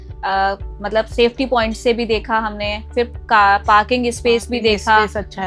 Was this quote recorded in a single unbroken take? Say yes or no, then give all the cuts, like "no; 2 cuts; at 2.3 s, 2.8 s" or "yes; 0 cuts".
yes; 0 cuts